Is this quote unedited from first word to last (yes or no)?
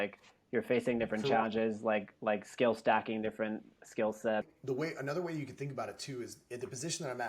no